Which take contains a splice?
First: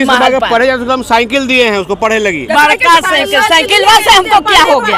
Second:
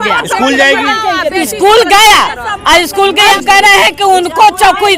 second; 1 cut; at 3.3 s

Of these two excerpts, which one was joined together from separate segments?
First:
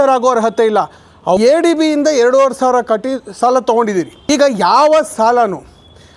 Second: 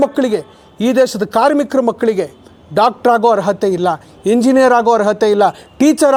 first; 2 cuts; at 1.4 s, 4.2 s

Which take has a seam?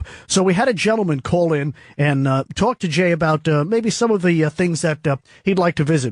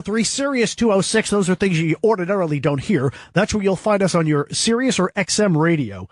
second; 1 cut; at 2.3 s

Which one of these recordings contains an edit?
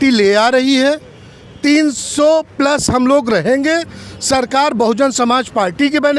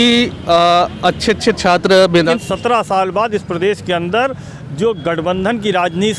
second; 1 cut; at 2.2 s

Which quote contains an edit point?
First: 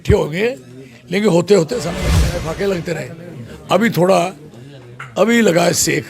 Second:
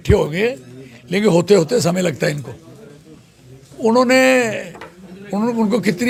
first; 1 cut; at 1.9 s

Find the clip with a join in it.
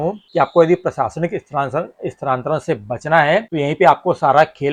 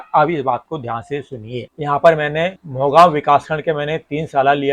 second; 1 cut; at 1.6 s

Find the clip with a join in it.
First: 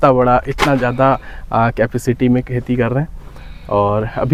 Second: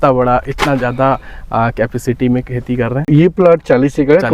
second; 1 cut; at 3.1 s

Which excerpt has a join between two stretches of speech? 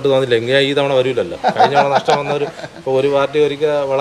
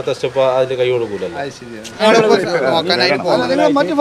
second; 1 cut; at 2.0 s

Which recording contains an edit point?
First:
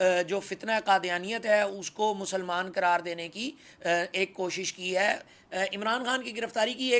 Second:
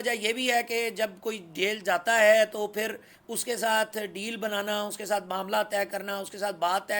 first; 1 cut; at 5.4 s

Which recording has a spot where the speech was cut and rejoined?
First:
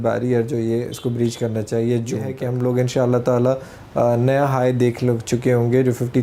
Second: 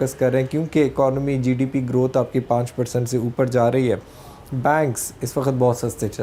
first; 1 cut; at 2.4 s

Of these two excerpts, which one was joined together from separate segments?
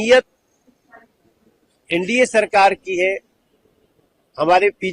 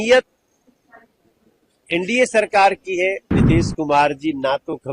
second; 1 cut; at 3.3 s

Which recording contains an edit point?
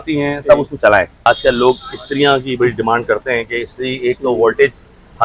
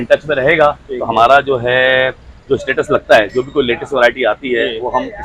first; 1 cut; at 1.3 s

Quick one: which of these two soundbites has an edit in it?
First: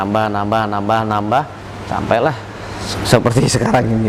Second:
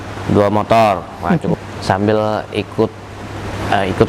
second; 1 cut; at 1.5 s

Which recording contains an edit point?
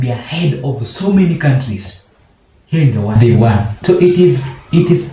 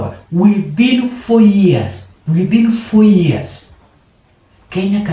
first; 1 cut; at 3.1 s

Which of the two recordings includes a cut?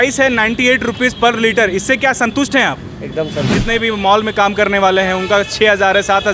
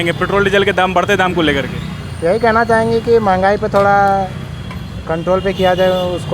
first; 1 cut; at 3.6 s

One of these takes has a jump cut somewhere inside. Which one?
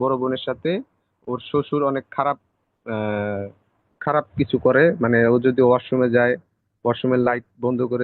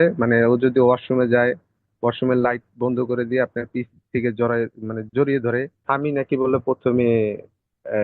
second; 1 cut; at 5.8 s

